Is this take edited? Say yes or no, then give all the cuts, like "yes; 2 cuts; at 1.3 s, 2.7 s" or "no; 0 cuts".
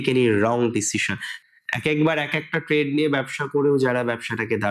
yes; 1 cut; at 1.3 s